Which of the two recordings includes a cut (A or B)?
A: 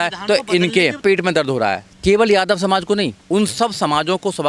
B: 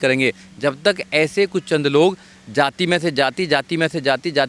A